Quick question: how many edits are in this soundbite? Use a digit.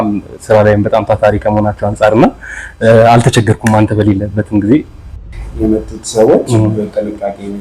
1